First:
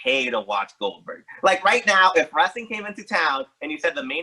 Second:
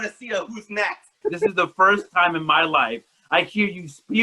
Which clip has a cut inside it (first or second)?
second